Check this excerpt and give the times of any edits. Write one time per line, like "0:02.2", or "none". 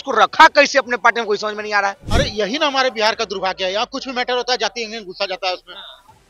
0:02.0